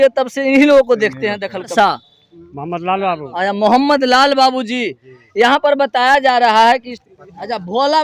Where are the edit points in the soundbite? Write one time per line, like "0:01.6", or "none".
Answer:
0:01.7
0:07.0